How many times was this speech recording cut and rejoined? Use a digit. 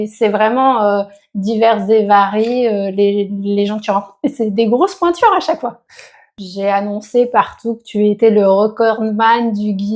1